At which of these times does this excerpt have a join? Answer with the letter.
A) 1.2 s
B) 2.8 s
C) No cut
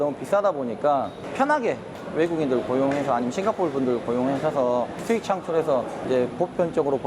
A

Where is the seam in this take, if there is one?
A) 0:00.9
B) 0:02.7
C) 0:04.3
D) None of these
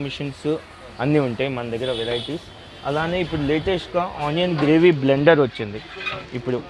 D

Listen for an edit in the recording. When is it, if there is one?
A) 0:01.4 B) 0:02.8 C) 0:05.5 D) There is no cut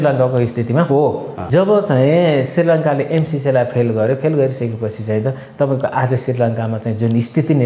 A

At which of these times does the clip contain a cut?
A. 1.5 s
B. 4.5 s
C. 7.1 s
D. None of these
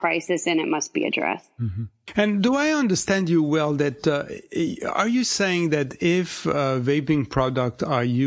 D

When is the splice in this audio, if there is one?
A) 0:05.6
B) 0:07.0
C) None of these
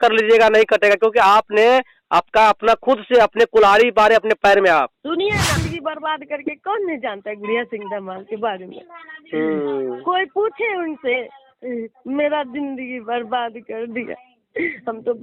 A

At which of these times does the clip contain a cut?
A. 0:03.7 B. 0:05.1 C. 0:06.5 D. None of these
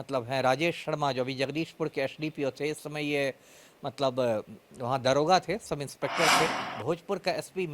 C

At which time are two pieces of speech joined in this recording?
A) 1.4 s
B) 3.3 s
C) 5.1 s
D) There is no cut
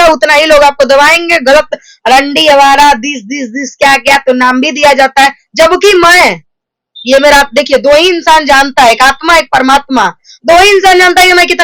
D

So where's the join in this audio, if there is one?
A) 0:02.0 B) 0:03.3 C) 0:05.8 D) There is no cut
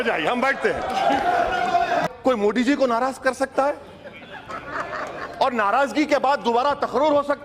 A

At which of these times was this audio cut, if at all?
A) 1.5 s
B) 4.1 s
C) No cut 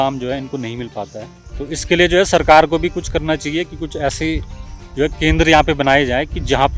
A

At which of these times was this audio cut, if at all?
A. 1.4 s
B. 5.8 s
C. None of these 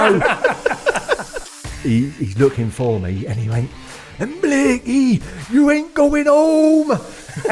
A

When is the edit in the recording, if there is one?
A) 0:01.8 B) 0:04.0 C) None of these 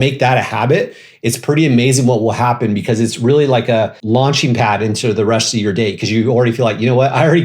B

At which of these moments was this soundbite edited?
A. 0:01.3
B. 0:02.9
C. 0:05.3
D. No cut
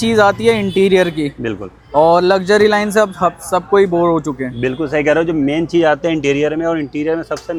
D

